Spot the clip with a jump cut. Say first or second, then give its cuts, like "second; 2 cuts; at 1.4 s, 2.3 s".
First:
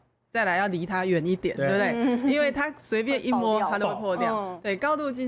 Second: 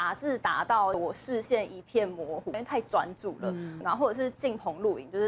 second; 3 cuts; at 1.0 s, 2.6 s, 3.8 s